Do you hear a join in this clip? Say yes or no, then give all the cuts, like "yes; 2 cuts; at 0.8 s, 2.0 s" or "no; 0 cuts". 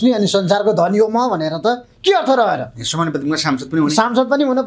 no; 0 cuts